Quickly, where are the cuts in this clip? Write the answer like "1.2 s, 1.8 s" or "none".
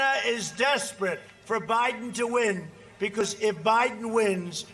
3.2 s